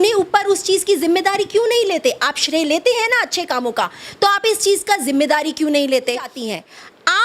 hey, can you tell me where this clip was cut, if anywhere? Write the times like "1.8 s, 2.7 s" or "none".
6.3 s